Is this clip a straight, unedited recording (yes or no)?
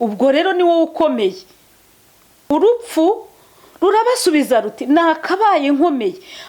no